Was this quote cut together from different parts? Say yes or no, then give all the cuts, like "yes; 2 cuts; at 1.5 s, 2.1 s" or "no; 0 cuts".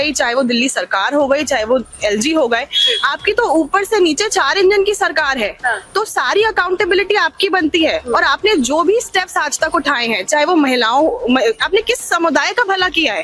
no; 0 cuts